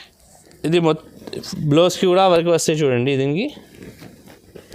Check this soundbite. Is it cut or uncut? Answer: uncut